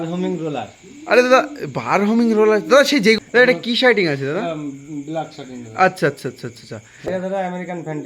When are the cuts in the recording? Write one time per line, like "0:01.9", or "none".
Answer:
0:03.2
0:07.2